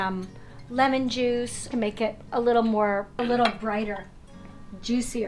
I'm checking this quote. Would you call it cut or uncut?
cut